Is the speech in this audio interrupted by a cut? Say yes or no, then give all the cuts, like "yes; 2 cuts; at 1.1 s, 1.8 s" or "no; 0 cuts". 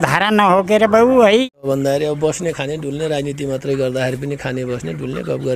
yes; 1 cut; at 1.5 s